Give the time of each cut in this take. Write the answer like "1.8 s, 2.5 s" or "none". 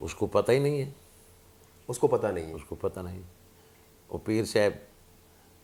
none

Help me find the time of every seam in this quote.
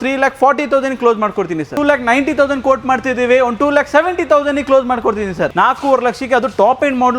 1.7 s, 5.5 s

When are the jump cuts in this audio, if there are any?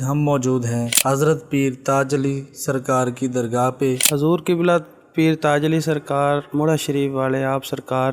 0.9 s, 4.0 s

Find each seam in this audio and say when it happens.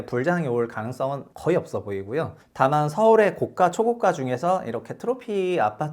1.3 s, 2.4 s

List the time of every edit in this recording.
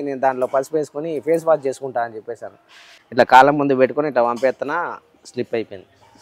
2.9 s

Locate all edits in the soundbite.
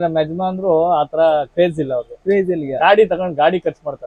none

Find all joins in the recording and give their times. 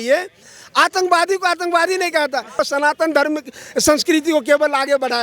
2.6 s

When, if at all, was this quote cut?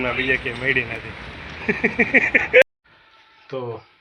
2.6 s

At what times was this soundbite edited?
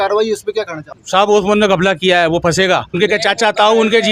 0.9 s, 2.9 s

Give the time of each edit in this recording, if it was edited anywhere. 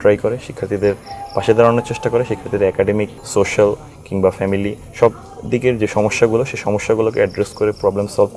3.2 s

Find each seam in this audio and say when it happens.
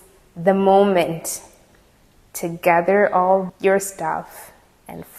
none

